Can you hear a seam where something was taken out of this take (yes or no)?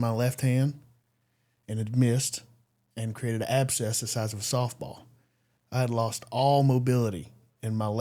no